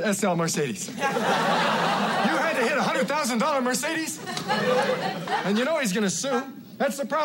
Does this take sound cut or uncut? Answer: cut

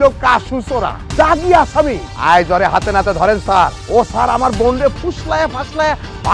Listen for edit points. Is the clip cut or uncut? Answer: cut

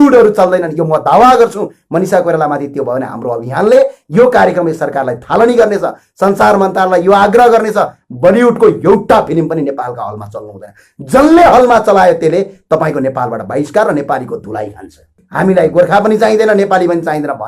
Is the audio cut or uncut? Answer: cut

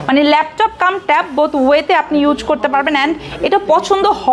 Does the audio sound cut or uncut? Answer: uncut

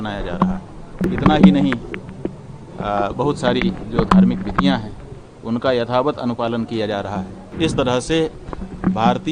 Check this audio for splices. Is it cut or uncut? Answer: cut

